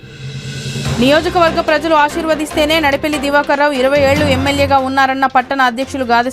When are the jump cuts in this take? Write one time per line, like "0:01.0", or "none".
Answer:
0:00.9